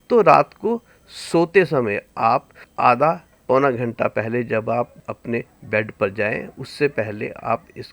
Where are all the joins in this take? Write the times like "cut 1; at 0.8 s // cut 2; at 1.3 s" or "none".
cut 1; at 2.6 s // cut 2; at 3.3 s // cut 3; at 5.0 s